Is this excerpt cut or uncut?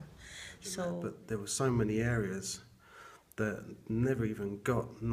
cut